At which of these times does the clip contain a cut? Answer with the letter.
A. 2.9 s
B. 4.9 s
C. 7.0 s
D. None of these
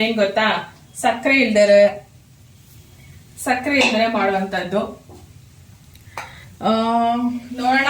D